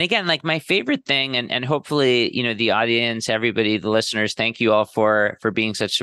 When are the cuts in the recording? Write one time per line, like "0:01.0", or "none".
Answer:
none